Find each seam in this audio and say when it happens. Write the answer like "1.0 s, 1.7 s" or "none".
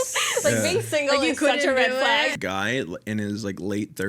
2.4 s